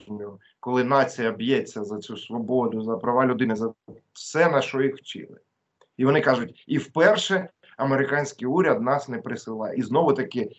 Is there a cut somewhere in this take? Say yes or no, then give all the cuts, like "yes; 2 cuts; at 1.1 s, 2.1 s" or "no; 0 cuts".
no; 0 cuts